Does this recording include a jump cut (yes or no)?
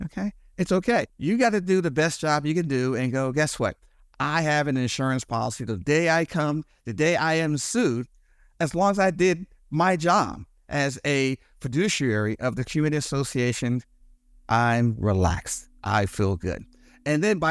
yes